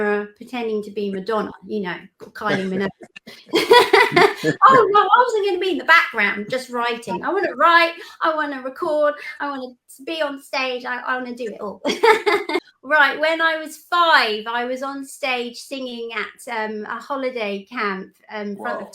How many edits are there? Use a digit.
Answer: 1